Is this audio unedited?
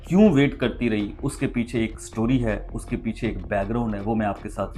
yes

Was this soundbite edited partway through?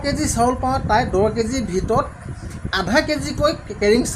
no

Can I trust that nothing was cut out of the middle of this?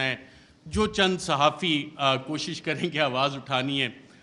yes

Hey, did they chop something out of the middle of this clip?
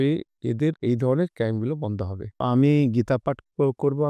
yes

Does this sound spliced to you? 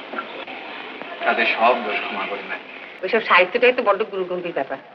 yes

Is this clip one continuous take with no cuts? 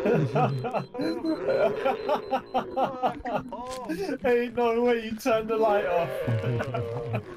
no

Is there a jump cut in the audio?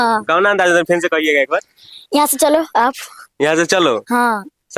no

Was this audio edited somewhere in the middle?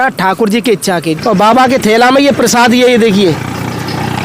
yes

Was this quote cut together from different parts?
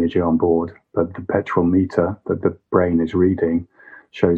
no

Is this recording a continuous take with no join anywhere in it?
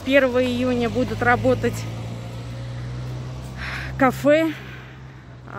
yes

